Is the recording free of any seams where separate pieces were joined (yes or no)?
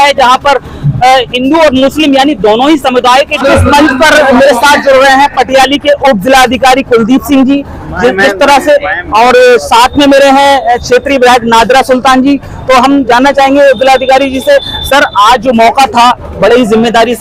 no